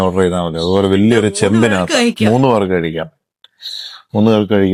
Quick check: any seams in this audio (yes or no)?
no